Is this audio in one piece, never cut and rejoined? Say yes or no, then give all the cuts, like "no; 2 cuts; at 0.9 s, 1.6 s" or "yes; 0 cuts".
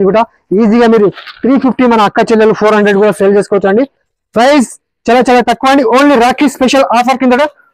yes; 0 cuts